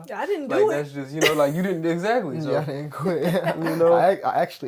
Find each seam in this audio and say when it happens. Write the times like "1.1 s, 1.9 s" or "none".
none